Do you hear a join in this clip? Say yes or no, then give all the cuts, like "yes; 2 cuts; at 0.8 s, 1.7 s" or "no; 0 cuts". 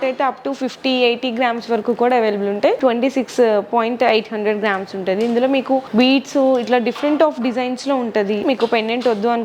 yes; 3 cuts; at 2.8 s, 5.9 s, 8.4 s